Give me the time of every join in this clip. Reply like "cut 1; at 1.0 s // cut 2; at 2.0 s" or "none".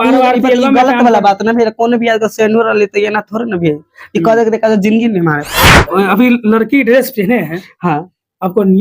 cut 1; at 5.8 s